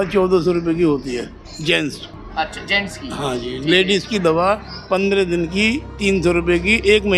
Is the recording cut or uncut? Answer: uncut